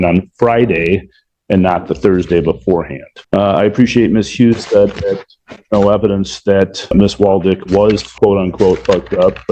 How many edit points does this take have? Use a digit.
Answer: 0